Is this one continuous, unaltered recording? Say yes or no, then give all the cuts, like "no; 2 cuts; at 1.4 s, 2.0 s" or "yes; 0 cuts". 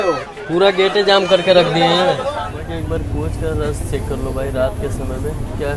no; 1 cut; at 2.4 s